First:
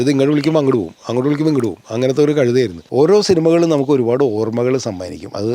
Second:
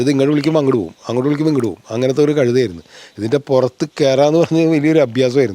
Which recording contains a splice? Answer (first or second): first